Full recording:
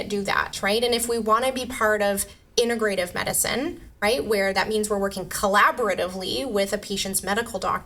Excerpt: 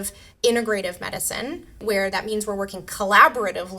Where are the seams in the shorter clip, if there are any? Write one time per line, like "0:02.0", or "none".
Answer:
0:01.8